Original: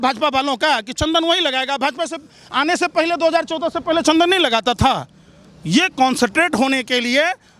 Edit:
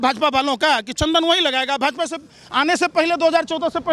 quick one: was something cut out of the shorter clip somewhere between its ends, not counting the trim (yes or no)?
no